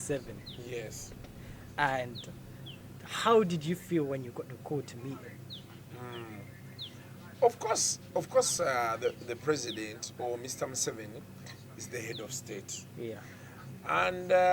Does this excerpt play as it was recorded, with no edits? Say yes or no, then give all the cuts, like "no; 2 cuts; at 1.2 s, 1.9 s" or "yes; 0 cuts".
yes; 0 cuts